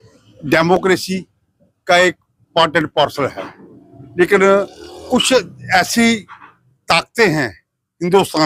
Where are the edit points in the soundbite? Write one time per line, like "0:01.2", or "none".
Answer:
none